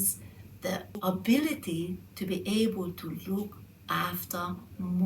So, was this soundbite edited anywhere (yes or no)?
yes